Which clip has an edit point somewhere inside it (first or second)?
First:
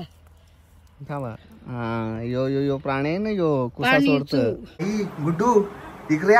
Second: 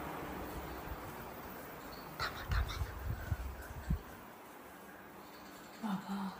first